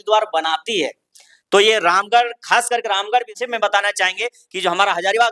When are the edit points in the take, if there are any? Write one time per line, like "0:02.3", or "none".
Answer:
0:03.3